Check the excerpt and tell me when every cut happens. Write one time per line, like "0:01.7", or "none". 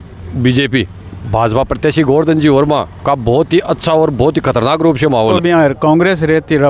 0:05.3